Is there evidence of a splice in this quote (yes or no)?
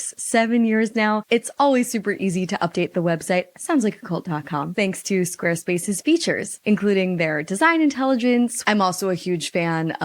yes